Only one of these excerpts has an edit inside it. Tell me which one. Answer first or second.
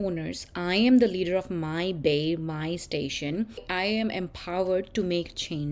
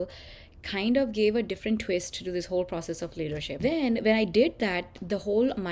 first